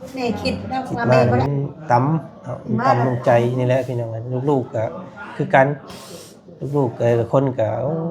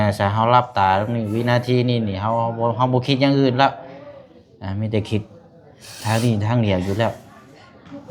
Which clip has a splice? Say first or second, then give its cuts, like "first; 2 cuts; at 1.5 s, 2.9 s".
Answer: first; 1 cut; at 1.1 s